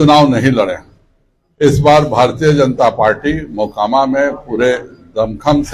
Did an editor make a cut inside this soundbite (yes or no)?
no